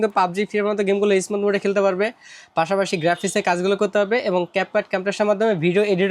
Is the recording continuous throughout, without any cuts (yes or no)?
yes